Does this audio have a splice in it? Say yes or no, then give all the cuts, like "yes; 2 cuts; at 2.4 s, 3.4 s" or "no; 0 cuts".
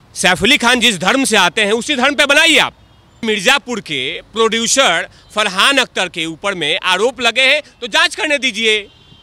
yes; 1 cut; at 3.2 s